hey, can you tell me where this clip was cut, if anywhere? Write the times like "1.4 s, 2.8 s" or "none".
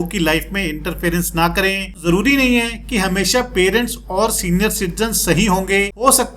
2.0 s